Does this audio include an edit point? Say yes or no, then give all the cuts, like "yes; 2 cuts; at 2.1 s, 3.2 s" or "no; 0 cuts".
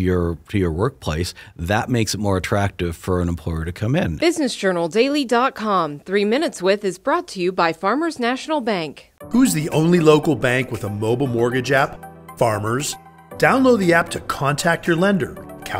yes; 1 cut; at 4.1 s